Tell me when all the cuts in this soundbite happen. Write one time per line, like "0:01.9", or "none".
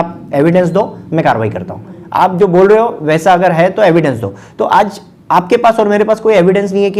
none